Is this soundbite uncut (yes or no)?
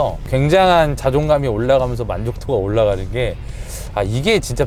yes